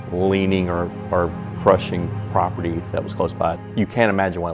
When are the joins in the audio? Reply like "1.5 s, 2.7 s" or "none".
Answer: 3.6 s